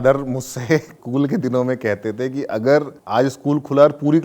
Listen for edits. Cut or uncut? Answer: cut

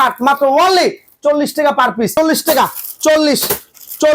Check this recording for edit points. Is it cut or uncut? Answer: cut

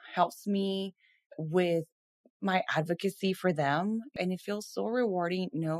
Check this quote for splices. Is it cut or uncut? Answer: cut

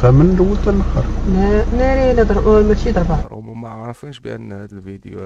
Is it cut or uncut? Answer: cut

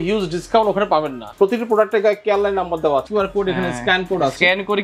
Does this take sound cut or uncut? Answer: cut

